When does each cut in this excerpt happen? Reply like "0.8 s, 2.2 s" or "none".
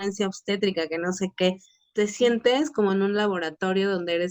1.8 s